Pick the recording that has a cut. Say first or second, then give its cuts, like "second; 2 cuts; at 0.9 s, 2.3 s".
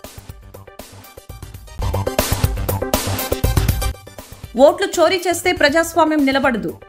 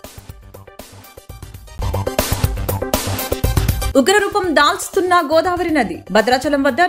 first; 1 cut; at 3.9 s